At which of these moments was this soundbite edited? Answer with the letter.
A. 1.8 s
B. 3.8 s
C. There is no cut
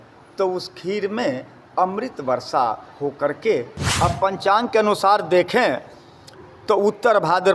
B